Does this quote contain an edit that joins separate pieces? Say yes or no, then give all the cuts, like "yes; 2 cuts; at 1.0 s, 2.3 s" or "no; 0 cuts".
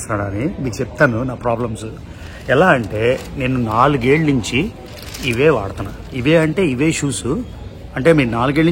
no; 0 cuts